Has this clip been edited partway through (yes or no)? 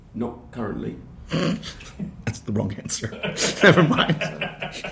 no